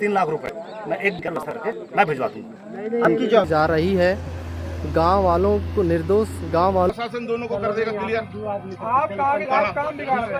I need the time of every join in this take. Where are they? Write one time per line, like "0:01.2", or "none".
0:03.5
0:06.9